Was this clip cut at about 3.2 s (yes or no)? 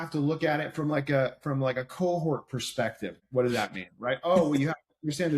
yes